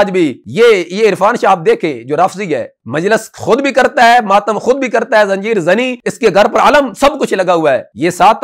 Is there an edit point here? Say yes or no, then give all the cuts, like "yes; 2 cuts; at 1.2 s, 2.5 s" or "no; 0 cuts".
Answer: no; 0 cuts